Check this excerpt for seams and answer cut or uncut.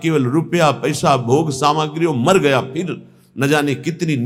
uncut